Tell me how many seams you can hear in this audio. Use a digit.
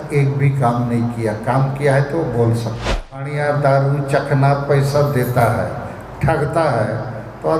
1